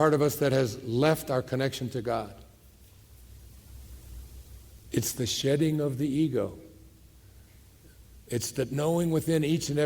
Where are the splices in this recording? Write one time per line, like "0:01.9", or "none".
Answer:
0:04.8